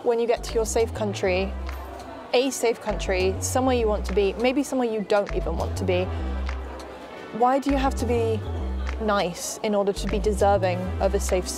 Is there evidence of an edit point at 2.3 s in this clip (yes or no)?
no